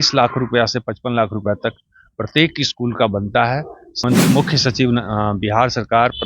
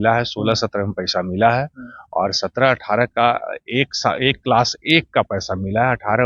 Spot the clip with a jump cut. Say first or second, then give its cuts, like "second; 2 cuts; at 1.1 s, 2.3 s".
first; 1 cut; at 4.0 s